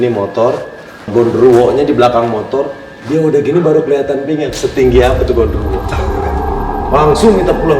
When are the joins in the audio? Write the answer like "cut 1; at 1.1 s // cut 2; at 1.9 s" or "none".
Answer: cut 1; at 1.1 s